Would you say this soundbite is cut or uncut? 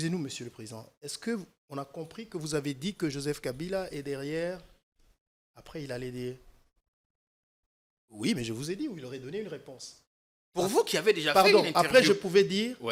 uncut